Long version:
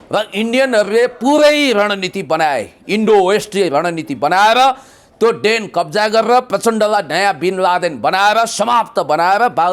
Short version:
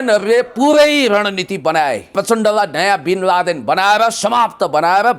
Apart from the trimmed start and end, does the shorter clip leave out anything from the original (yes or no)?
yes